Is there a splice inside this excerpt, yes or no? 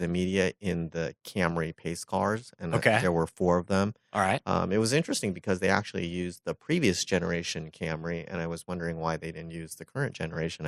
no